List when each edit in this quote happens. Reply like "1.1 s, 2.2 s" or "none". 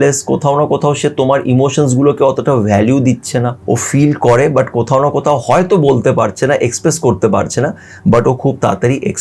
3.6 s